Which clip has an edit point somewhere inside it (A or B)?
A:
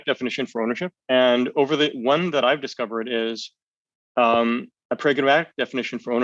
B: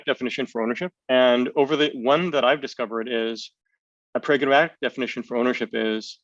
B